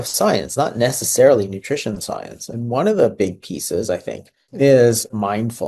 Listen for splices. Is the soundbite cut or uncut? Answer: uncut